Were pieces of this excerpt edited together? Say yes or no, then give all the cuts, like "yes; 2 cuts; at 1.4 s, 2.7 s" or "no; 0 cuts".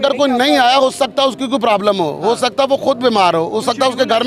no; 0 cuts